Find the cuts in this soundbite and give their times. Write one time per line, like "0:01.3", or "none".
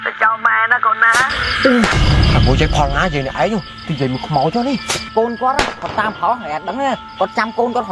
0:01.4
0:04.9